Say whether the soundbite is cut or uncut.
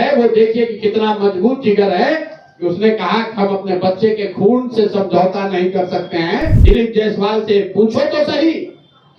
cut